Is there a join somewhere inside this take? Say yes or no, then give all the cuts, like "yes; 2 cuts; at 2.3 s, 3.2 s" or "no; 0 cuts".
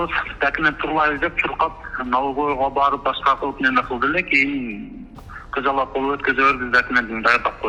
no; 0 cuts